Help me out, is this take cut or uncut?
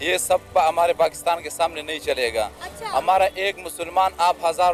uncut